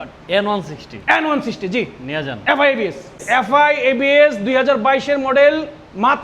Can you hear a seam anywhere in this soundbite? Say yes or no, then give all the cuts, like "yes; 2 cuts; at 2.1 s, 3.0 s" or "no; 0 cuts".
yes; 1 cut; at 3.2 s